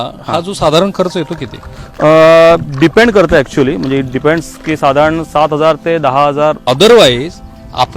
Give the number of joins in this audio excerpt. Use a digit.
1